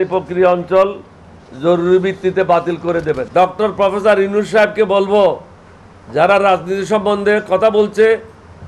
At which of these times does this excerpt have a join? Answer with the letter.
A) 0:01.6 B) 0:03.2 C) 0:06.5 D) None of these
B